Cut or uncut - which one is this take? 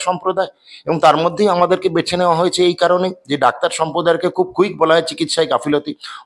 uncut